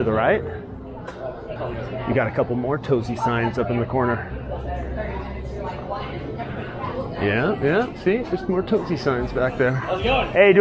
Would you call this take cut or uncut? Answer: cut